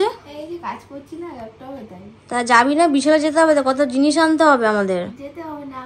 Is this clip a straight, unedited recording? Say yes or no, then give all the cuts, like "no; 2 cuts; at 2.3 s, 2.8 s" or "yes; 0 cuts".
yes; 0 cuts